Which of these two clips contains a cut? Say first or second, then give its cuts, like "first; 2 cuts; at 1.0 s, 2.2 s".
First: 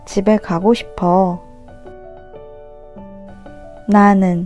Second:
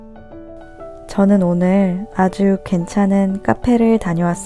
second; 1 cut; at 1.1 s